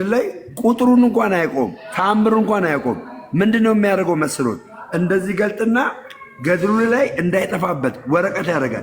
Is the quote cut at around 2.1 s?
no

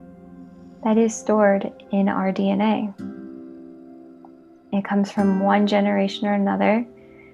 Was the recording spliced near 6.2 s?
no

